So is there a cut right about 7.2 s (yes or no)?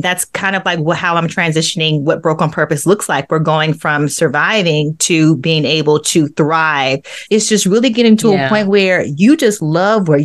yes